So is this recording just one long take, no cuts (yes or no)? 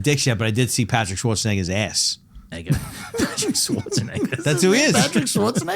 no